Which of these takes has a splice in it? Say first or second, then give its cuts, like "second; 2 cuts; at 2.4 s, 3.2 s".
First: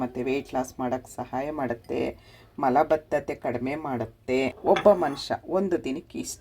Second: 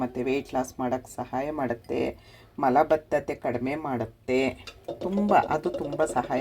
first; 1 cut; at 4.5 s